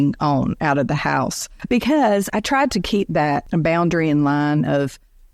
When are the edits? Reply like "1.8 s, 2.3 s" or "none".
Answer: 1.5 s, 2.3 s, 3.4 s